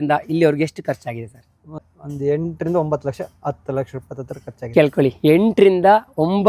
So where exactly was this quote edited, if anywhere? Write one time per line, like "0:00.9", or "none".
0:01.7

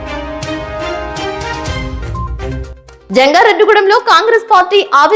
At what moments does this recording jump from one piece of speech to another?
0:02.7

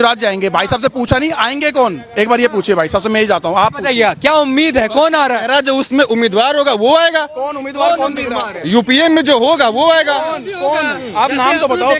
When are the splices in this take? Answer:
none

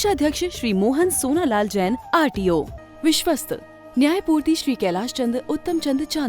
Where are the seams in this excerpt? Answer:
0:02.8

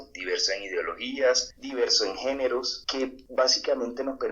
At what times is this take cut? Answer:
0:01.6
0:03.1

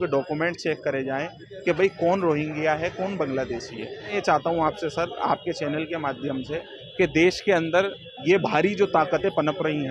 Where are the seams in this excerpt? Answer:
0:04.1

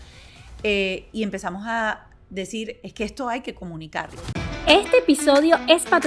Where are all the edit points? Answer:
0:04.2

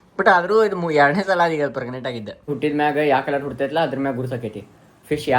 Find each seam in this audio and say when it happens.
0:02.5

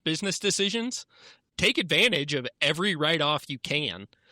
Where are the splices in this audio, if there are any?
0:01.5

